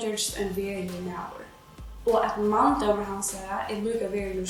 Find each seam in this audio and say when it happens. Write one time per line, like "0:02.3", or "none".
none

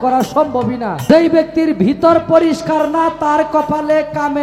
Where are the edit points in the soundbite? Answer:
0:00.9

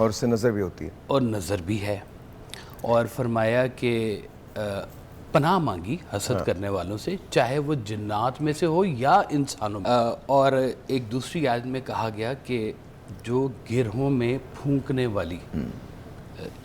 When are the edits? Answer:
0:09.7

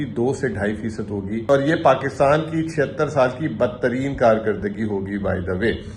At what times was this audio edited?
0:01.4

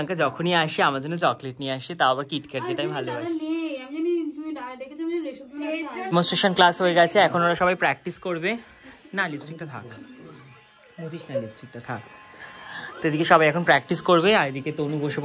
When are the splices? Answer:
0:06.1

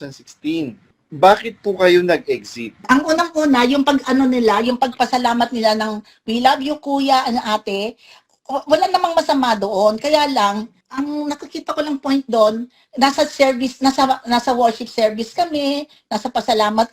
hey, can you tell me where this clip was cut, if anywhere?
0:00.9
0:02.8

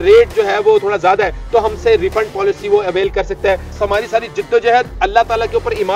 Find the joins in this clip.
0:03.7

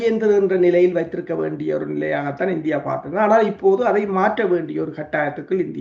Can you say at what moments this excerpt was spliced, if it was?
none

